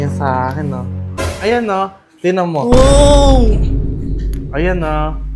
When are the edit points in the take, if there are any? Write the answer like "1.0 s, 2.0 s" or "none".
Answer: 1.2 s